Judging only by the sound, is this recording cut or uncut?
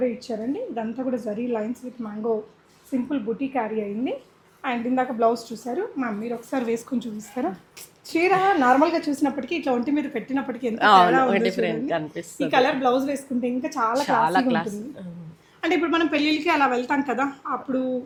uncut